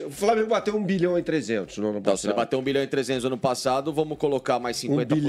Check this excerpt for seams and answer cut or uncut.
uncut